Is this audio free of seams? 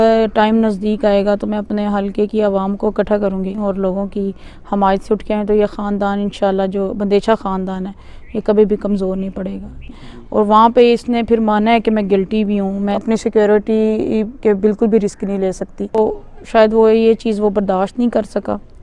no; 4 cuts; at 3.6 s, 9.9 s, 13.0 s, 16.0 s

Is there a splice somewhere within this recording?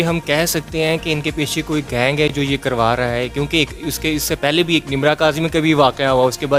no; 0 cuts

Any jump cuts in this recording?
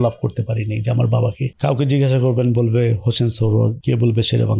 no; 0 cuts

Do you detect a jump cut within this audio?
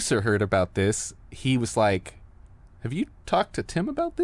no; 0 cuts

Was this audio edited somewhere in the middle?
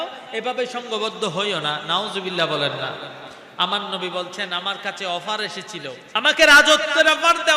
yes; 1 cut; at 6.0 s

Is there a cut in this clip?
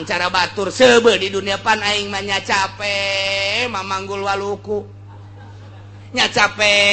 no; 0 cuts

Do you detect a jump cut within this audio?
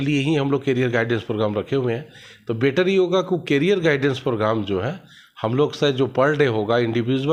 no; 0 cuts

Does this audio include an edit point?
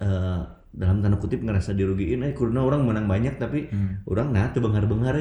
no; 0 cuts

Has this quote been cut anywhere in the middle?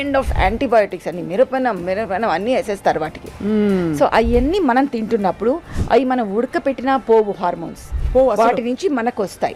no; 0 cuts

